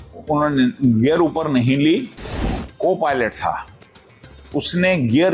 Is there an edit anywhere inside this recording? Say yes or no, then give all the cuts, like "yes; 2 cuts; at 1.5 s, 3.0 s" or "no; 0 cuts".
yes; 1 cut; at 2.6 s